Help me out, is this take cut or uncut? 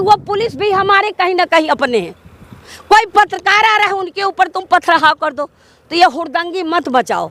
uncut